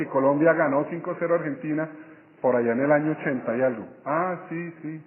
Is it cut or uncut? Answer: uncut